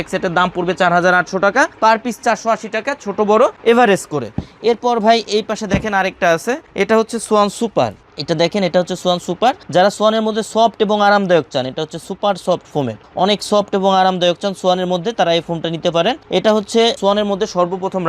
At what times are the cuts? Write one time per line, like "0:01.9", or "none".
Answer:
none